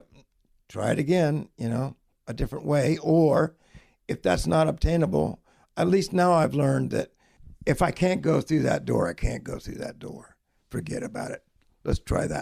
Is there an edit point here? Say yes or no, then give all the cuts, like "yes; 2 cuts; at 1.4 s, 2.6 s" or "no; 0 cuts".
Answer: no; 0 cuts